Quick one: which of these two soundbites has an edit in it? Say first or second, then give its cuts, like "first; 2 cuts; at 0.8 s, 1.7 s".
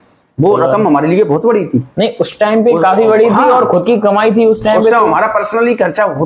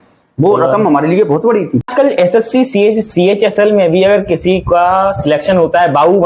second; 1 cut; at 1.9 s